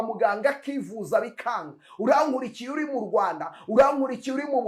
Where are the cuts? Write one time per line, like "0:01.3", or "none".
none